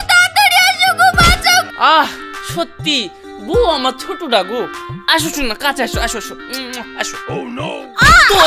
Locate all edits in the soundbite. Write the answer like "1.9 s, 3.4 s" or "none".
1.7 s

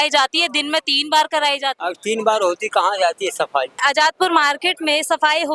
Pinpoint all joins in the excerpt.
1.8 s, 3.8 s

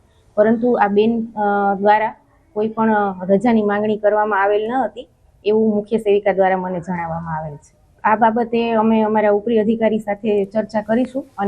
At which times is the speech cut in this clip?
4.2 s

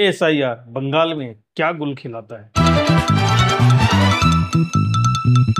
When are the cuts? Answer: 2.4 s

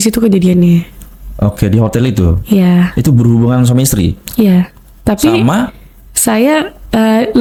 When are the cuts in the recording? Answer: none

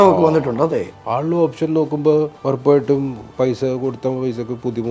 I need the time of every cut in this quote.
1.0 s, 2.4 s, 3.2 s

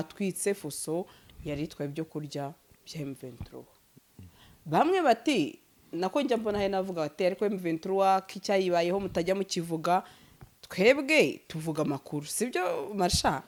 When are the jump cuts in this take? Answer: none

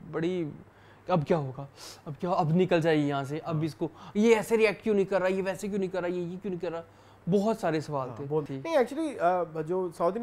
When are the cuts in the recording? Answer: 8.5 s

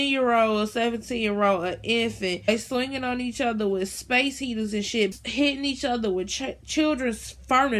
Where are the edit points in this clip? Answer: 5.2 s

